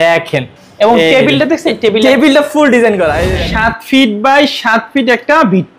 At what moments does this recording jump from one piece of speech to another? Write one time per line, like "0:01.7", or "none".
0:03.3